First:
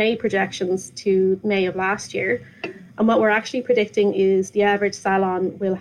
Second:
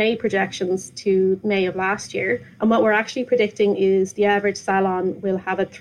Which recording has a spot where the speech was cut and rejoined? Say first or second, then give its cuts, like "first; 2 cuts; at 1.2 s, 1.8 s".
second; 1 cut; at 2.5 s